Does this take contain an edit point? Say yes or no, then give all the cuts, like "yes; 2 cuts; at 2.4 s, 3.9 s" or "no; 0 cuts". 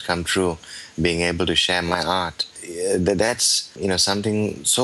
yes; 2 cuts; at 2.6 s, 3.8 s